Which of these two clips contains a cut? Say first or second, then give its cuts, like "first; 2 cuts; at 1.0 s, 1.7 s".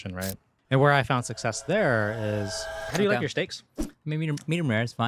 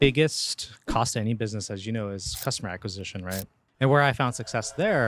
first; 1 cut; at 2.9 s